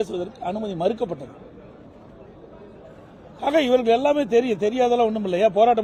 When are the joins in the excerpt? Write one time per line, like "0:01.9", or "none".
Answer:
none